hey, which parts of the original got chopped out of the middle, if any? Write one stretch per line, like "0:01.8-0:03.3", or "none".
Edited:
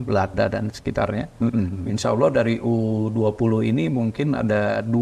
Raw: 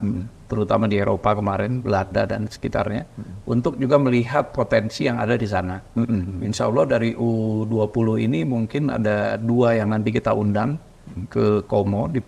0:03.0-0:05.8